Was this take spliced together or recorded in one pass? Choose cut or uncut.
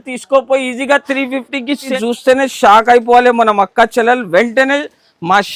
cut